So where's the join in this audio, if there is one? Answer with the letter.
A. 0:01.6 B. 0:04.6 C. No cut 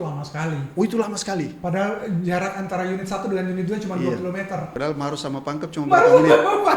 B